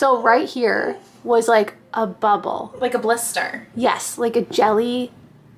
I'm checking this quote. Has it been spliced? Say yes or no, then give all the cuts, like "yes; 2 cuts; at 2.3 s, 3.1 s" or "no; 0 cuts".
no; 0 cuts